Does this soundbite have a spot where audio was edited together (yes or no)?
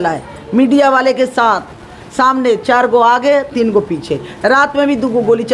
no